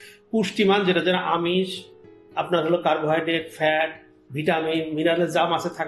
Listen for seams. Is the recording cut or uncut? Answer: uncut